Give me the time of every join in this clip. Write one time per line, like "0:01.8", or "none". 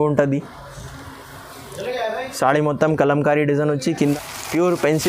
0:03.9